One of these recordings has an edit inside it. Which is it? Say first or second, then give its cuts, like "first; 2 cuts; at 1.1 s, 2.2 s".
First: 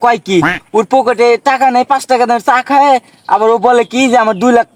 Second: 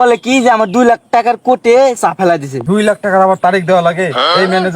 second; 1 cut; at 2.5 s